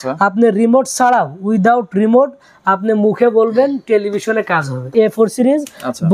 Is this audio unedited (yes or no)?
no